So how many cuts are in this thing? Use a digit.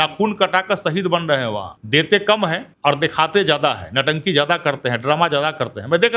2